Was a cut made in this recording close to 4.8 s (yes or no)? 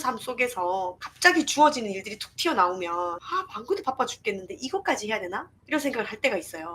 no